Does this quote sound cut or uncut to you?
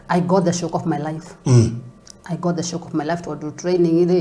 uncut